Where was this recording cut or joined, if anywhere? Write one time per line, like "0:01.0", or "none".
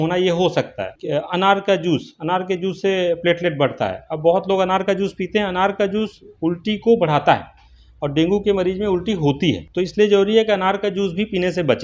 0:00.9
0:09.7